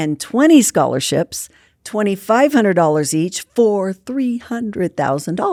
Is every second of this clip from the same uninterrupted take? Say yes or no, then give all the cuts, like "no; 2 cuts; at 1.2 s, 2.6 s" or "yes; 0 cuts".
yes; 0 cuts